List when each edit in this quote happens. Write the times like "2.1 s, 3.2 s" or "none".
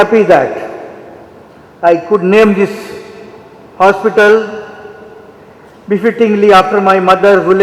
none

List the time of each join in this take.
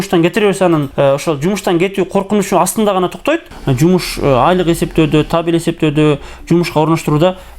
3.5 s

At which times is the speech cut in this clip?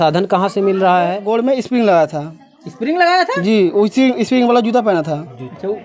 1.2 s

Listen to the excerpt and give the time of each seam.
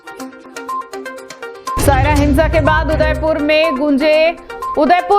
1.4 s

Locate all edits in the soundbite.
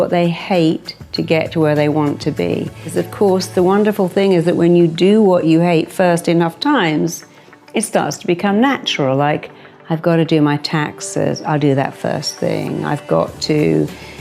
2.9 s

